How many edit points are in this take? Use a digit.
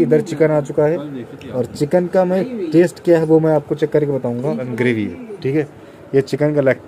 1